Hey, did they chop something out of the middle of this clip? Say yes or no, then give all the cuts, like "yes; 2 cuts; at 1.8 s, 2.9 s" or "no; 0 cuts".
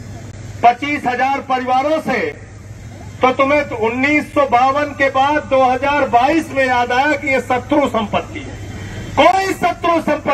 no; 0 cuts